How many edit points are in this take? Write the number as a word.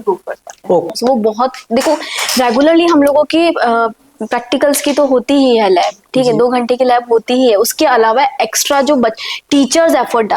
one